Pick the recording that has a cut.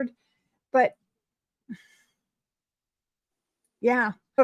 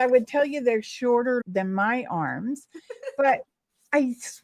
second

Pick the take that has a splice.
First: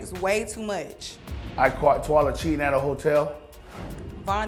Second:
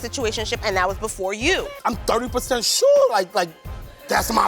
second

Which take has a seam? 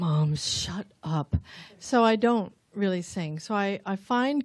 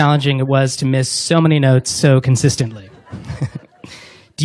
first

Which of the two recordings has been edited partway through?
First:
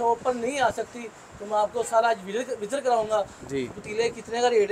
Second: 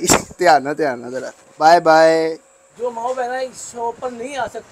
second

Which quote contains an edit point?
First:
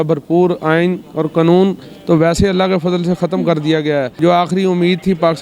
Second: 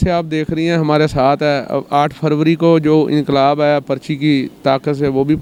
first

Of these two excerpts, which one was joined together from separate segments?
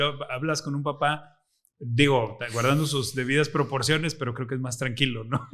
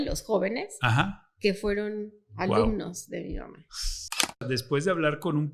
second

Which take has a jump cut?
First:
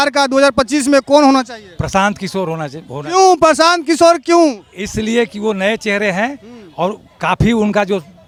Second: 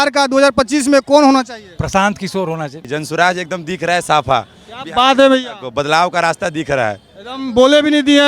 second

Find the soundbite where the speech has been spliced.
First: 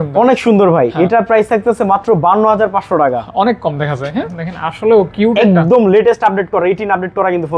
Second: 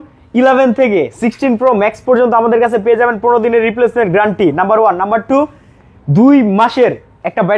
first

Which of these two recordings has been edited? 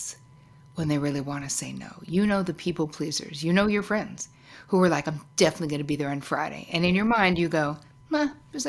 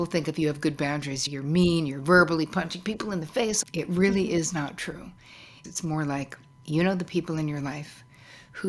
second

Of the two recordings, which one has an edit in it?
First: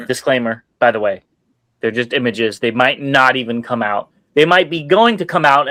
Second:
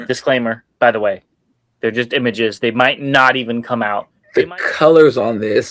second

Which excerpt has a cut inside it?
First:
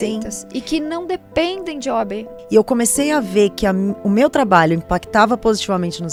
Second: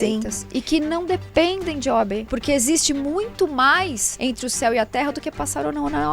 second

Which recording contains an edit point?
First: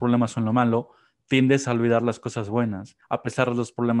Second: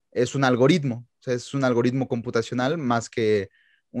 first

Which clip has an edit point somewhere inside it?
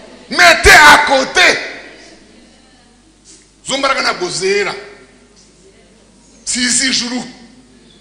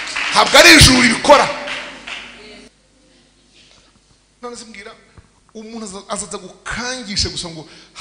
second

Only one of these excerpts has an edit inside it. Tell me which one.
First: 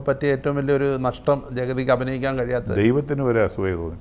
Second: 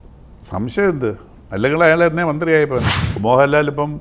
second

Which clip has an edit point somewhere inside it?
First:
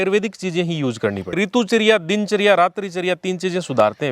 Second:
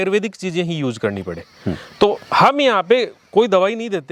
first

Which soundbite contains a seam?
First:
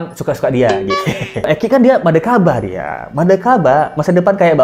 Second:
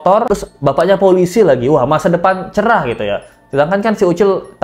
first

